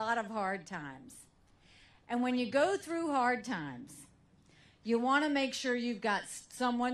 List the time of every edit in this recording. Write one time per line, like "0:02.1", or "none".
0:04.2

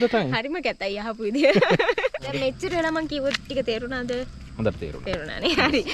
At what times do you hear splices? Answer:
0:02.3

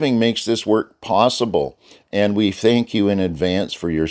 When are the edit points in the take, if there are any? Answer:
none

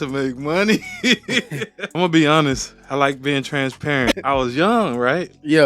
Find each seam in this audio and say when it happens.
0:01.8
0:04.2

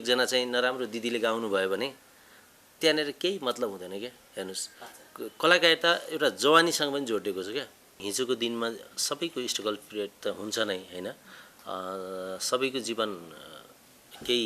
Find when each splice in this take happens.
0:08.0

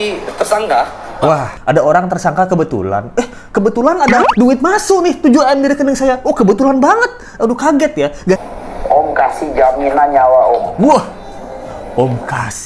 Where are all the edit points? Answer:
0:01.5
0:08.4

